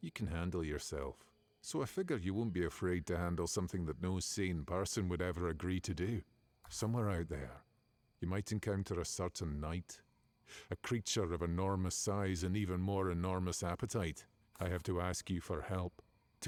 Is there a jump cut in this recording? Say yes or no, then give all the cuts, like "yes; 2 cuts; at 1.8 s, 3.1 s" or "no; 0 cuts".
no; 0 cuts